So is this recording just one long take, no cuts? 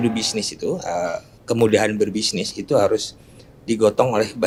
yes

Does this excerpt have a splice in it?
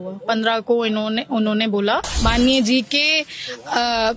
yes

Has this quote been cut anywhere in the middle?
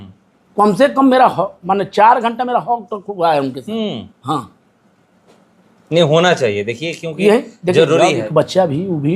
yes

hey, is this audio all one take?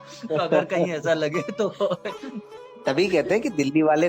no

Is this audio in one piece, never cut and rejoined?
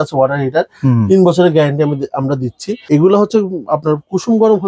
yes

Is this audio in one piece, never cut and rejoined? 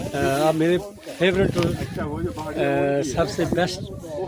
yes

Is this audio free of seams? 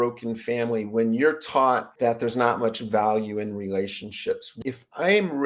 no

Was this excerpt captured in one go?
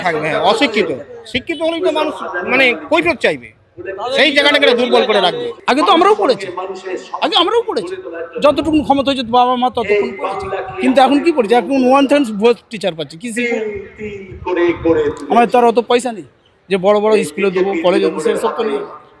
no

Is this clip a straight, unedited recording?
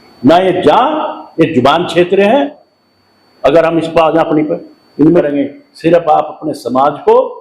no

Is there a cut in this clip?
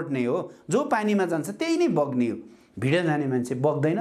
no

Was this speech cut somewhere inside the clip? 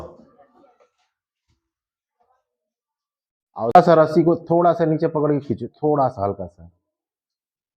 yes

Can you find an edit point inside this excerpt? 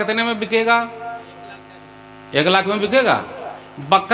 no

